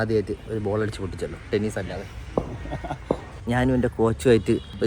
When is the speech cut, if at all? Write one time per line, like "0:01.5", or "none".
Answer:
0:03.4